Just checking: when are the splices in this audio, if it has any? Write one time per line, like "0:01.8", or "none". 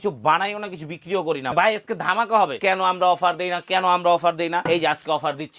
0:01.5
0:02.6
0:04.7